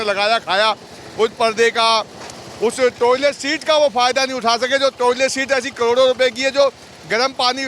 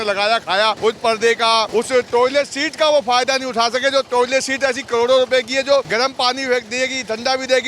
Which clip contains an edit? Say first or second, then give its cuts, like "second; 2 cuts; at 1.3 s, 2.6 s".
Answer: second; 3 cuts; at 0.8 s, 1.7 s, 5.9 s